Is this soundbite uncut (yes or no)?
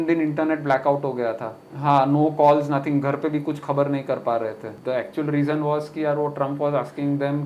no